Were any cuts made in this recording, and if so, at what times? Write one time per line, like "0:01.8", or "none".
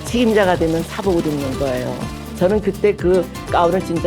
0:00.9
0:02.2